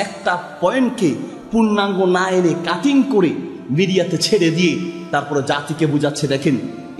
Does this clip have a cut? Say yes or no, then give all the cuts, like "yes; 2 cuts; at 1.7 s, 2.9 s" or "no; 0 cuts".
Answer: no; 0 cuts